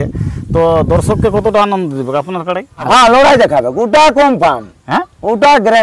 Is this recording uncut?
no; 1 cut; at 2.9 s

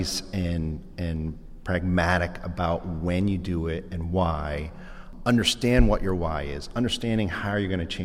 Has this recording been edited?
yes; 1 cut; at 5.1 s

